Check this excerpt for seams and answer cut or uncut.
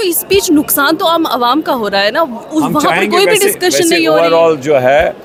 uncut